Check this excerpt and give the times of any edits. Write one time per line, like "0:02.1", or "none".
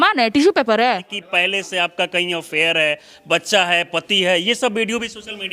0:01.2